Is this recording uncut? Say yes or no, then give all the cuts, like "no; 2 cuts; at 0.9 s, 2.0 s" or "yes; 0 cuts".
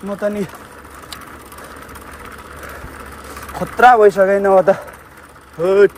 yes; 0 cuts